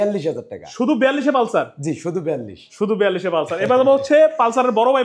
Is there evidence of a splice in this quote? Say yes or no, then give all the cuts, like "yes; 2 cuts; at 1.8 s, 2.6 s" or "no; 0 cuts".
no; 0 cuts